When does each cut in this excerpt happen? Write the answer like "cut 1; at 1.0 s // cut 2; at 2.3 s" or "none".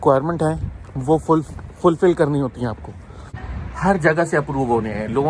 cut 1; at 3.4 s